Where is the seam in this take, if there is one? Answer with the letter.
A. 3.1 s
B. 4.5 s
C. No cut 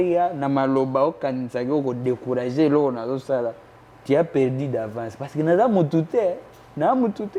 C